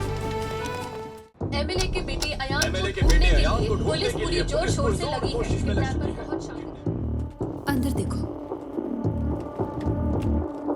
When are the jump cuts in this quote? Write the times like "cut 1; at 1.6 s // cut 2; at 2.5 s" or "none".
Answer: cut 1; at 1.1 s